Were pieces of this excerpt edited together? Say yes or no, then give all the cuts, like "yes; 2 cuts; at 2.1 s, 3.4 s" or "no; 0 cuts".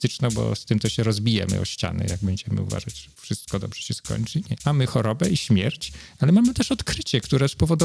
yes; 1 cut; at 4.5 s